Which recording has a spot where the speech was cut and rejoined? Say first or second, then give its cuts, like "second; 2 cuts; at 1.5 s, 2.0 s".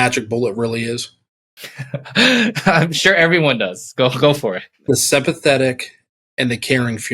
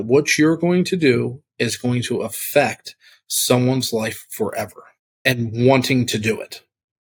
first; 1 cut; at 4.7 s